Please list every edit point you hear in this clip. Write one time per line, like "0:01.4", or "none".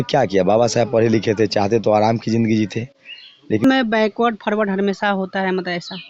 0:03.7